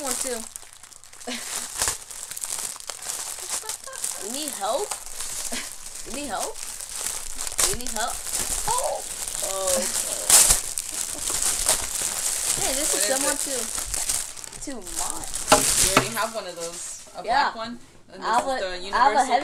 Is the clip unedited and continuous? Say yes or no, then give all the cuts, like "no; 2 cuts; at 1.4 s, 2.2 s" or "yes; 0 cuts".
yes; 0 cuts